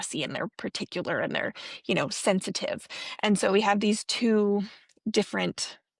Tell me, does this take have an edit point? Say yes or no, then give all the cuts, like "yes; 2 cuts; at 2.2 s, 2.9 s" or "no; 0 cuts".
no; 0 cuts